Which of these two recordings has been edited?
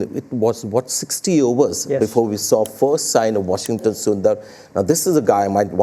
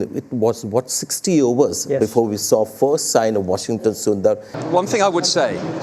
second; 1 cut; at 4.6 s

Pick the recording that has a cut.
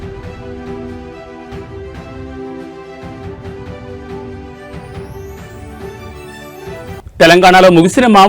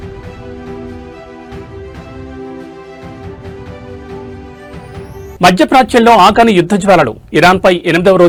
first; 2 cuts; at 5.3 s, 7.0 s

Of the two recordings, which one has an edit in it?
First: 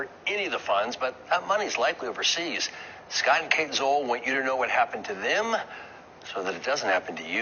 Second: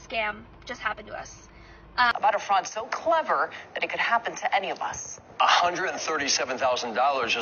second; 1 cut; at 2.1 s

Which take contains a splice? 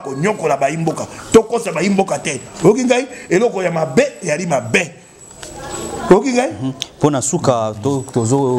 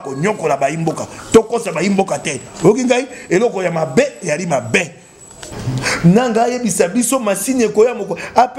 second; 1 cut; at 5.5 s

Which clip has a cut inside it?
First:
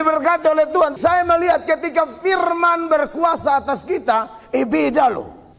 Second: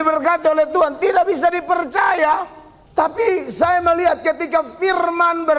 first; 1 cut; at 0.9 s

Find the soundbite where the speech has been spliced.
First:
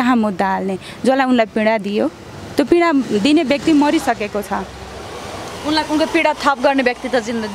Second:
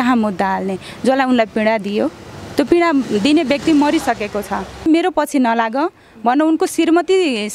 second; 1 cut; at 4.9 s

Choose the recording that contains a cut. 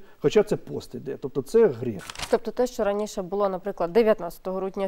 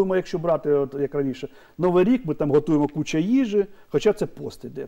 first; 1 cut; at 2.1 s

